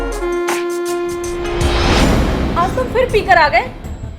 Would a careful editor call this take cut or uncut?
cut